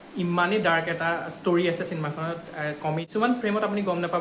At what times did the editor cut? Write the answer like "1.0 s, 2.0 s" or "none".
3.0 s